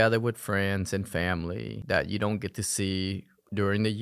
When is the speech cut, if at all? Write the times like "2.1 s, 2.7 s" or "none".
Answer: none